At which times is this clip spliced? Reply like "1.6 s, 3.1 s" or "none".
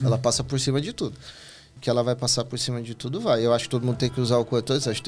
1.7 s